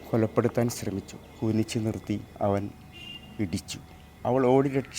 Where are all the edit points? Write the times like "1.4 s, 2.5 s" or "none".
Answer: 1.2 s, 2.3 s, 4.2 s